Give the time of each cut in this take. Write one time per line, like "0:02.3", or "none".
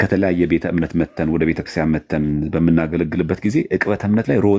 none